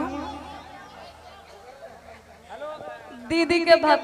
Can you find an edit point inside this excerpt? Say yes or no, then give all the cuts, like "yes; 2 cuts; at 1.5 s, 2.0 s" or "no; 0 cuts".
no; 0 cuts